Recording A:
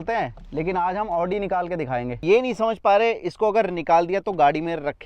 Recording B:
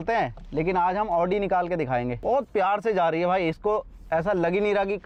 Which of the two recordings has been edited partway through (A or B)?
A